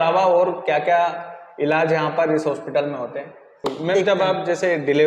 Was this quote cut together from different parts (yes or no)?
yes